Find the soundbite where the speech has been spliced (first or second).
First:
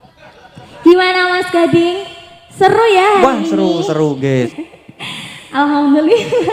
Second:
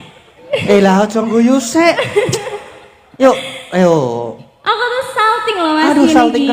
first